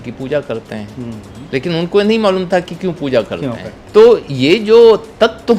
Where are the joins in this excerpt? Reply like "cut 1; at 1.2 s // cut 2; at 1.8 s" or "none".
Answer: cut 1; at 3.7 s